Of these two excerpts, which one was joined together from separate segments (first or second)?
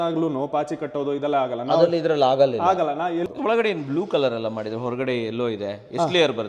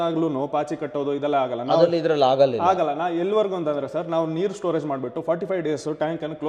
first